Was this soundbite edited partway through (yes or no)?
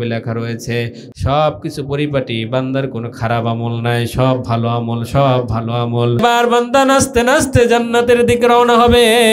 yes